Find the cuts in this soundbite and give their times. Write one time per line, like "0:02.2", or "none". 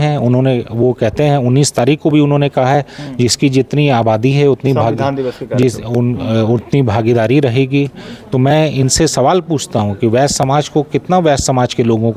none